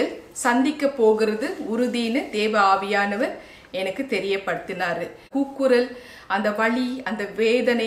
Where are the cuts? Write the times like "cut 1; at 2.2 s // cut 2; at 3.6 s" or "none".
cut 1; at 5.2 s

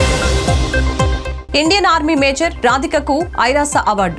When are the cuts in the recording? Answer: none

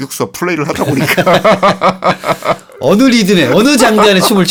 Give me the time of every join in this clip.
none

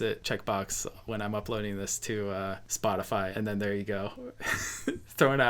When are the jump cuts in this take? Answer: cut 1; at 3.3 s

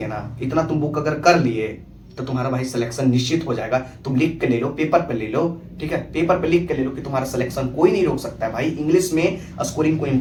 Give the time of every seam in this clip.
none

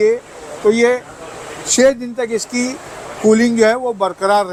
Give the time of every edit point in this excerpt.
none

